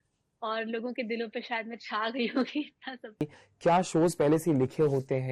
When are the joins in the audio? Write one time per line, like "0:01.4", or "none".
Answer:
0:03.2